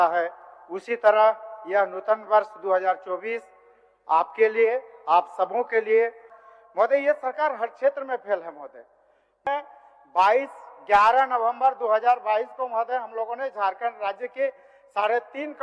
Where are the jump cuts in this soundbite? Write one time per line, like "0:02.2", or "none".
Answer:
0:06.4
0:09.4